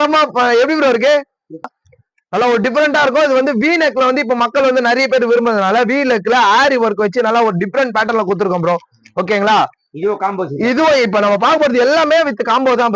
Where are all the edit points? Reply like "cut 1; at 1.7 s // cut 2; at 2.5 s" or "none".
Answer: cut 1; at 1.7 s